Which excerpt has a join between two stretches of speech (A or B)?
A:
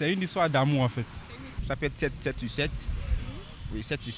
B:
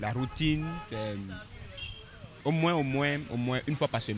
A